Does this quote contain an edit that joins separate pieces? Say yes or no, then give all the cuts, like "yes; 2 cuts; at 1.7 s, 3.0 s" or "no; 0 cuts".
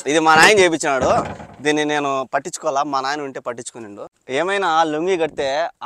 yes; 1 cut; at 4.1 s